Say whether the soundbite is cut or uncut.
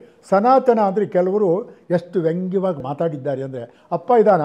cut